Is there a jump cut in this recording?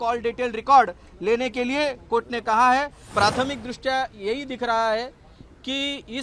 yes; 1 cut; at 3.0 s

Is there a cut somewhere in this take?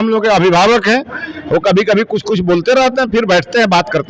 no; 0 cuts

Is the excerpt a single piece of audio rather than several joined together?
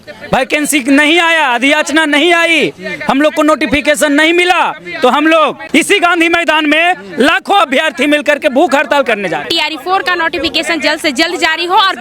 no; 2 cuts; at 5.6 s, 9.4 s

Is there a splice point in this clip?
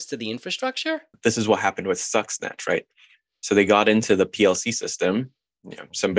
yes; 1 cut; at 1.2 s

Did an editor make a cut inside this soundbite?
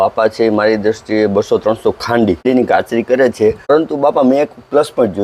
yes; 2 cuts; at 2.4 s, 3.7 s

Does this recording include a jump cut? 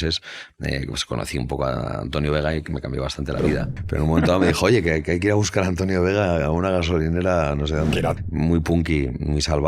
yes; 2 cuts; at 3.7 s, 8.2 s

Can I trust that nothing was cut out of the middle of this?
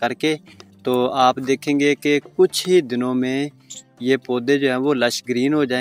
yes; 0 cuts

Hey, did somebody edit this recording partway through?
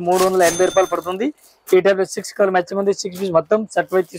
no; 0 cuts

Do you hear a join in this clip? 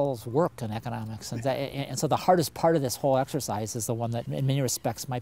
no; 0 cuts

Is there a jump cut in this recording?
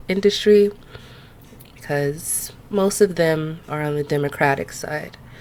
no; 0 cuts

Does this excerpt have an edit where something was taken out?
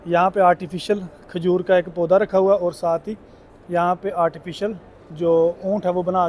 no; 0 cuts

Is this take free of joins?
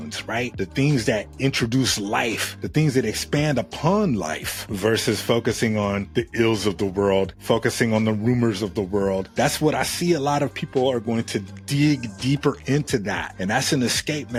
yes; 0 cuts

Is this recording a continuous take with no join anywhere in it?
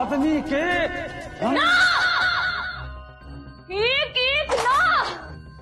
yes; 0 cuts

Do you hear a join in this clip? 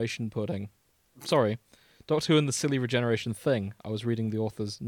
no; 0 cuts

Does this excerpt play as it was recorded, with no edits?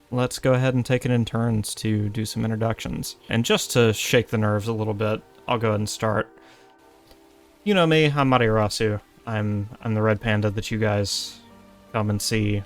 no; 1 cut; at 3.3 s

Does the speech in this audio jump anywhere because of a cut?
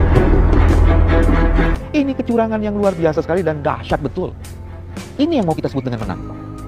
no; 0 cuts

